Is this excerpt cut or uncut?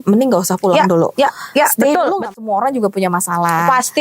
cut